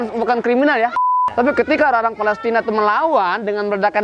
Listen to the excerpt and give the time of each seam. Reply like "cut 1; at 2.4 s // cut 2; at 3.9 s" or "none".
cut 1; at 1.0 s